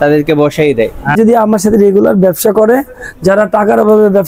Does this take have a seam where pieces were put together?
yes; 1 cut; at 1.1 s

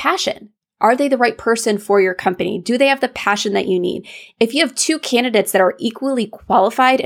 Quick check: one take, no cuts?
yes; 0 cuts

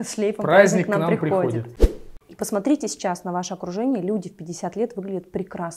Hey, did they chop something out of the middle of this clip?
yes; 1 cut; at 2.1 s

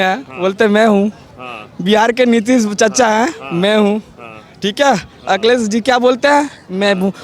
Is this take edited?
no; 0 cuts

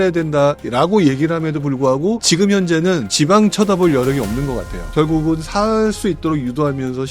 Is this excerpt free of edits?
no; 1 cut; at 4.9 s

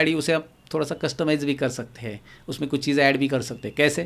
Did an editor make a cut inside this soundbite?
no; 0 cuts

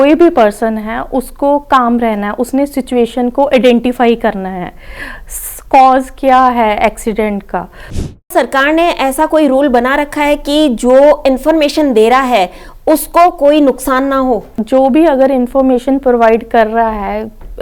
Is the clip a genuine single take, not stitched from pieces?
no; 2 cuts; at 8.2 s, 14.5 s

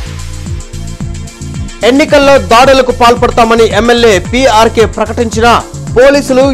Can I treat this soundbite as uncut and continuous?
no; 1 cut; at 1.3 s

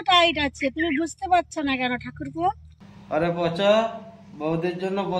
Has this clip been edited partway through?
yes; 1 cut; at 2.9 s

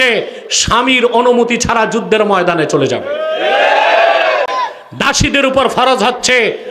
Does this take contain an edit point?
no; 0 cuts

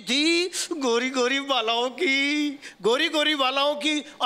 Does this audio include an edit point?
no; 0 cuts

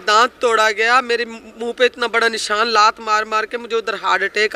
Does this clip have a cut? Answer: no; 0 cuts

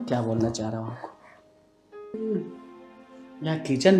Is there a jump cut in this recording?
yes; 1 cut; at 2.1 s

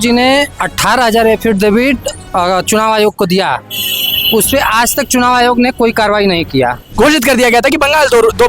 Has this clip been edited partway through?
yes; 1 cut; at 6.8 s

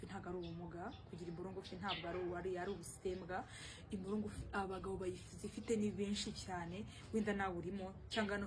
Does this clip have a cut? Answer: no; 0 cuts

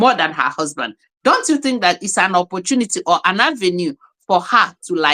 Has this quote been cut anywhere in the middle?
no; 0 cuts

